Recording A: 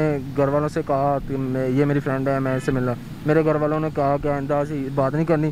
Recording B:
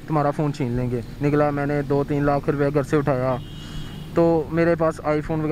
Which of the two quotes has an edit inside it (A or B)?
B